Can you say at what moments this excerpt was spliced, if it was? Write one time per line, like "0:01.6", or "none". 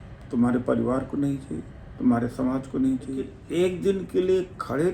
0:03.4

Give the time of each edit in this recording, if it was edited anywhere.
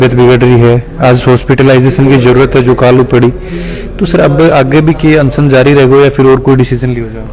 none

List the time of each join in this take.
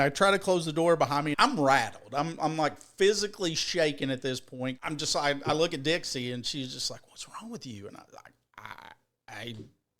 0:01.3
0:04.8

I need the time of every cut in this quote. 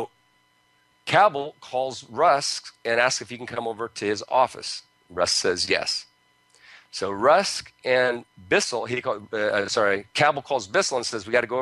0:09.1

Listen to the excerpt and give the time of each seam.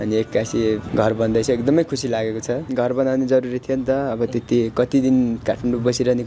0:00.9
0:02.7

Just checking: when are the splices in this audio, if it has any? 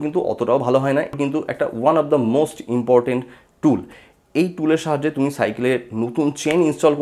0:01.2

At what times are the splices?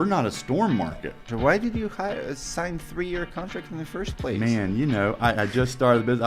0:01.3

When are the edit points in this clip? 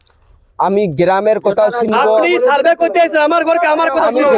none

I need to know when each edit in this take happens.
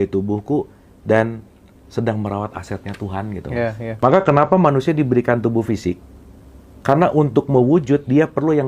0:03.9

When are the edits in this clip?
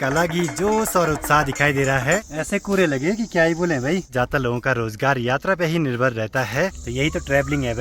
0:02.2
0:04.1
0:06.8

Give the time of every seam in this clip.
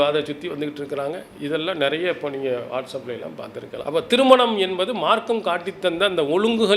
0:03.8

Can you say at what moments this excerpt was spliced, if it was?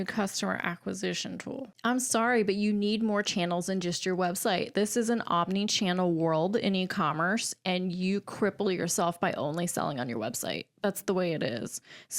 0:01.7

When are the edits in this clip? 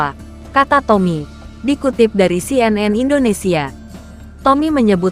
none

